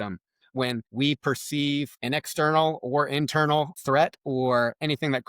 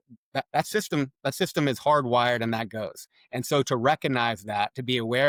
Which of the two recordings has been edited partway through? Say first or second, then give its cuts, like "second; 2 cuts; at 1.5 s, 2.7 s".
first; 3 cuts; at 0.9 s, 1.9 s, 3.7 s